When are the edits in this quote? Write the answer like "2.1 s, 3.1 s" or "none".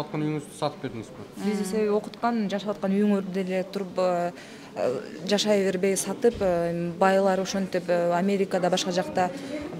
none